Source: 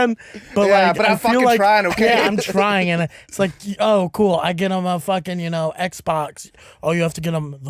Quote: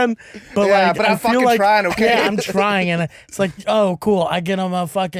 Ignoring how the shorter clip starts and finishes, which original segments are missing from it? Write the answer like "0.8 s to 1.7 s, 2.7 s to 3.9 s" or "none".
3.6 s to 3.7 s